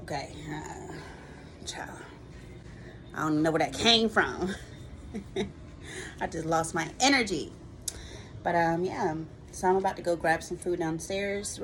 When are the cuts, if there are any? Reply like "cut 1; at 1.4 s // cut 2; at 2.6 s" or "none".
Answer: none